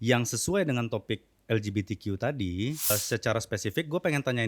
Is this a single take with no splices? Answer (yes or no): no